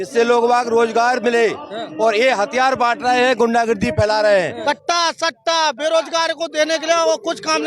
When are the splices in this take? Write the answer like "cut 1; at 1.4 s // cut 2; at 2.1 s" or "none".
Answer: cut 1; at 4.6 s